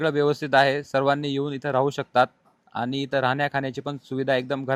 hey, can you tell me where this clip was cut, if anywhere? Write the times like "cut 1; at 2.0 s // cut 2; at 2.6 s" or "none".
none